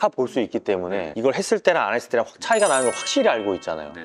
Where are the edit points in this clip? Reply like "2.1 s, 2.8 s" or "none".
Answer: none